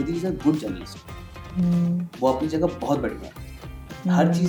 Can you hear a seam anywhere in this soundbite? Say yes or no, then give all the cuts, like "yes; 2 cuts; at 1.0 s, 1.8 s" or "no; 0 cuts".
no; 0 cuts